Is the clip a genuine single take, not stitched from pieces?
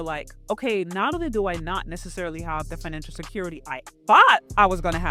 yes; 0 cuts

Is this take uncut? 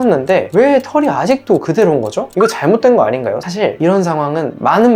no; 1 cut; at 3.5 s

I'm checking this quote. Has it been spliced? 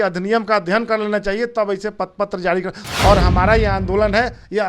yes; 1 cut; at 2.8 s

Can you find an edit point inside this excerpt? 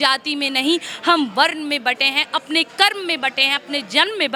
no; 0 cuts

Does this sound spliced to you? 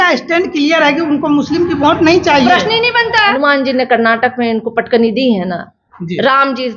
yes; 1 cut; at 3.4 s

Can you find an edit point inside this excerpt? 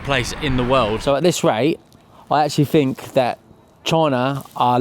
yes; 1 cut; at 1.0 s

